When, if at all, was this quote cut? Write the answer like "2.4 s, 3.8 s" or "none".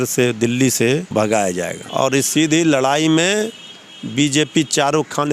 1.1 s, 1.8 s